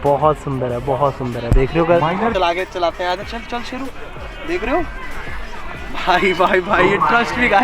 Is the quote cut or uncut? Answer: cut